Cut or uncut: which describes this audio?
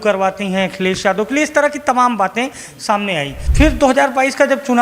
cut